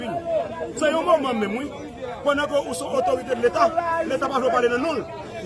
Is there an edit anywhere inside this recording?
no; 0 cuts

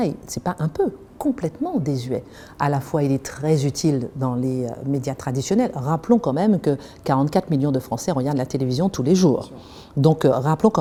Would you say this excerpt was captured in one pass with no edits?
yes; 0 cuts

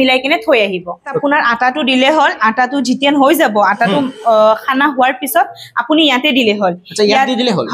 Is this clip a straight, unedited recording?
no; 1 cut; at 1.1 s

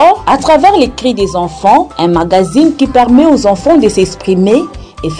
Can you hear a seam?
no; 0 cuts

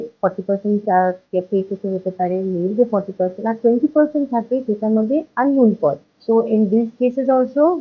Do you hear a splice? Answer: yes; 1 cut; at 6.1 s

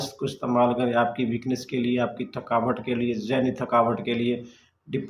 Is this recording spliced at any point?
no; 0 cuts

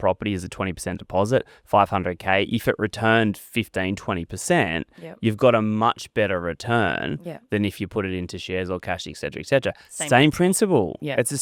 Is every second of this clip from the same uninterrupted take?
yes; 0 cuts

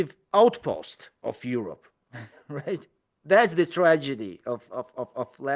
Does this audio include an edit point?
no; 0 cuts

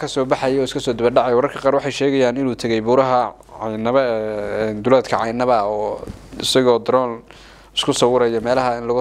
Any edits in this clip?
no; 0 cuts

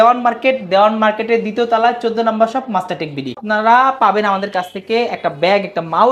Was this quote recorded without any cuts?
no; 1 cut; at 3.4 s

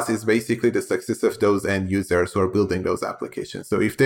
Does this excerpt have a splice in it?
no; 0 cuts

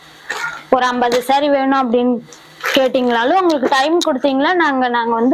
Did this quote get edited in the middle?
no; 0 cuts

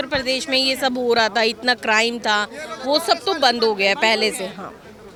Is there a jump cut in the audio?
no; 0 cuts

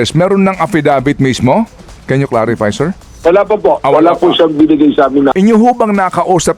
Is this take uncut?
no; 1 cut; at 5.3 s

